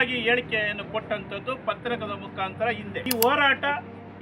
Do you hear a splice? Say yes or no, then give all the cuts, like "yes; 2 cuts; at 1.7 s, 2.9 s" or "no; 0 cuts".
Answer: yes; 1 cut; at 2.9 s